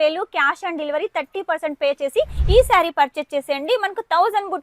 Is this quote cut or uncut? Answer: cut